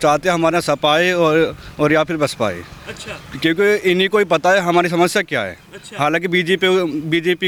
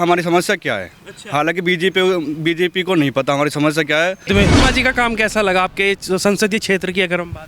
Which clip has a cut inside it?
second; 1 cut; at 4.3 s

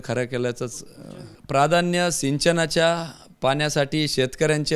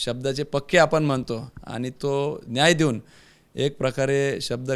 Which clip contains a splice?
first; 1 cut; at 1.3 s

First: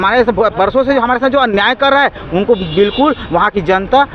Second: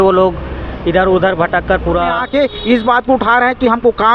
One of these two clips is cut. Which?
second; 1 cut; at 2.2 s

